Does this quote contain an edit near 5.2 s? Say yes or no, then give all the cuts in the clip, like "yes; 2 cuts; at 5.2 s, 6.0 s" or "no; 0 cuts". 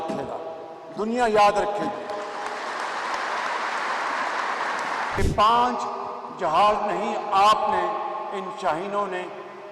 yes; 1 cut; at 5.2 s